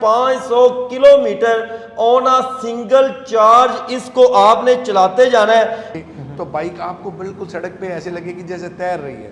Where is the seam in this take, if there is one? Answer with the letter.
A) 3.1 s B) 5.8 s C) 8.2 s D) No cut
B